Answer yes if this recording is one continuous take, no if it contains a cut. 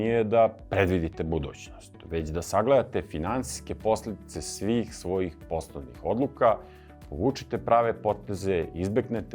yes